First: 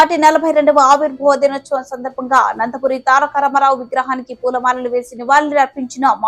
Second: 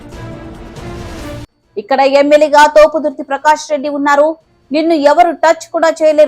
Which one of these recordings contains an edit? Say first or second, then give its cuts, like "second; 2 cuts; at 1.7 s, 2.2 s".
second; 1 cut; at 0.9 s